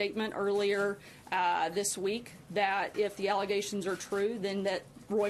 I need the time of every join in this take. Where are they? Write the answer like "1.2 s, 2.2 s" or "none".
2.9 s